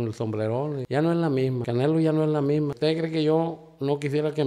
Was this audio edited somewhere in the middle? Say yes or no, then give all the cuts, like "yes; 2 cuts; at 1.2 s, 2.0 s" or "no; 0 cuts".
yes; 3 cuts; at 0.8 s, 1.6 s, 2.7 s